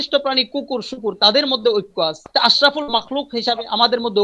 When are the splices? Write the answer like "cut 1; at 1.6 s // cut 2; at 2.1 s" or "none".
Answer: cut 1; at 2.2 s